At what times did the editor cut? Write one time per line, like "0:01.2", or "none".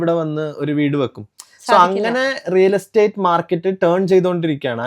none